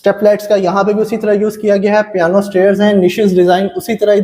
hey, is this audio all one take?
yes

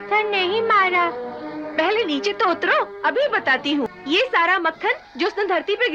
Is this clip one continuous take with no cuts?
no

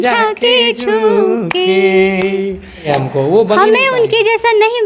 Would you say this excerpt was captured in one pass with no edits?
no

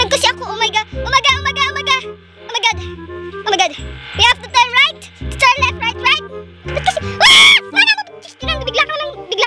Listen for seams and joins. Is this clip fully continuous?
no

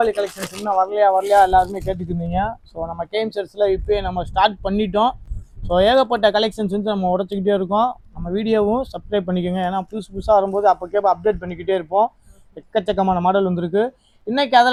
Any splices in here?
no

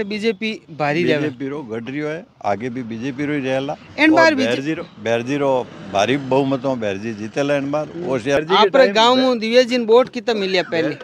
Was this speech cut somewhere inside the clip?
yes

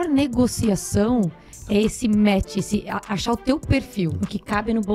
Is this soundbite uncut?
yes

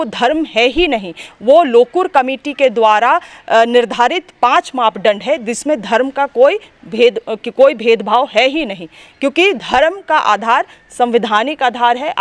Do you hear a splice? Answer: no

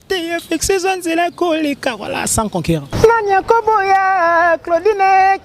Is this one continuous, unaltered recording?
no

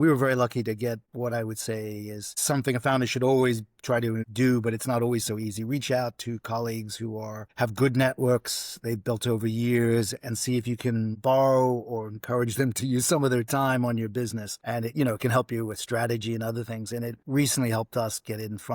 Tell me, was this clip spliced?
yes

